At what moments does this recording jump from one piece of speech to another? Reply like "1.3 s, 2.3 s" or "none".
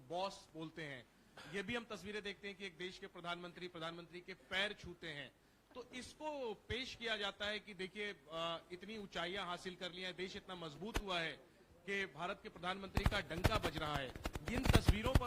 none